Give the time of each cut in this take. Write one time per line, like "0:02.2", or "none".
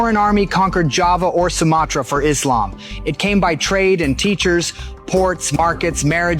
none